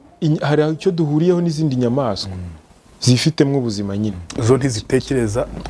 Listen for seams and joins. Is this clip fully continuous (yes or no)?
yes